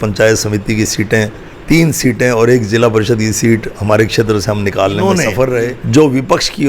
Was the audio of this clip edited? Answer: yes; 1 cut; at 5.8 s

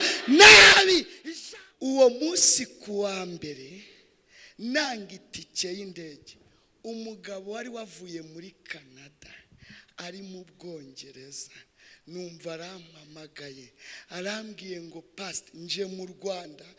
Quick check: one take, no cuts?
no; 1 cut; at 1.1 s

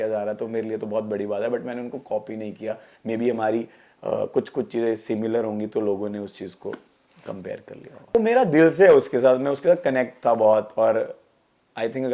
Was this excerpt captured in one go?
no; 1 cut; at 8.1 s

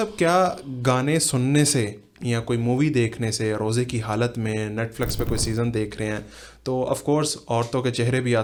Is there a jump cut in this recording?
no; 0 cuts

